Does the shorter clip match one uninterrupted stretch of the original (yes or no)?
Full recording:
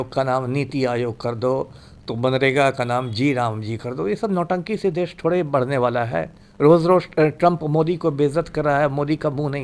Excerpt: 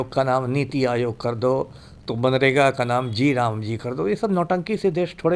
yes